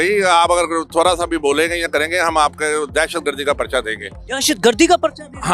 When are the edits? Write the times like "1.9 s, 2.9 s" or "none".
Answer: none

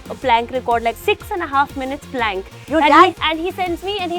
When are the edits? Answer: 1.0 s, 3.1 s

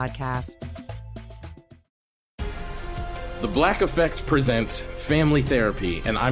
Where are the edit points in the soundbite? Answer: 1.9 s

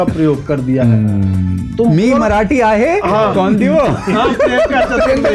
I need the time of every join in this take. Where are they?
none

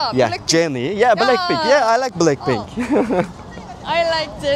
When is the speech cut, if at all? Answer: none

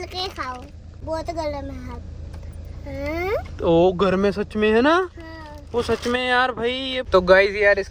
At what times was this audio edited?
1.0 s, 6.9 s

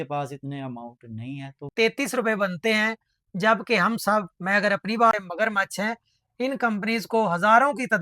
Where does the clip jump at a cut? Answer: 1.7 s, 5.1 s

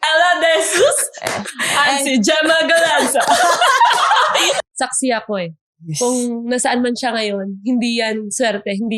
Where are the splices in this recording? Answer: 4.6 s

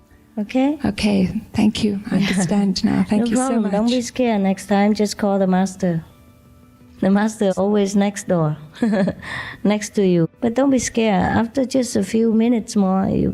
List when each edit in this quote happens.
6.9 s, 10.3 s

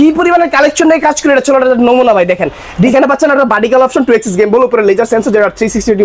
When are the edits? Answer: 2.9 s

